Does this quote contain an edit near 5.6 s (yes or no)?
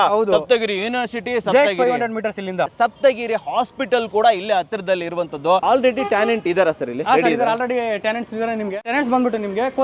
yes